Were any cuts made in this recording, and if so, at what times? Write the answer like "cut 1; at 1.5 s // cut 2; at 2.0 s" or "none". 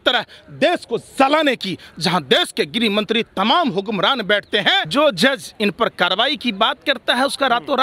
cut 1; at 4.9 s